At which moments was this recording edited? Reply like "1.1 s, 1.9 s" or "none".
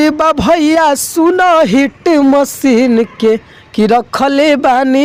none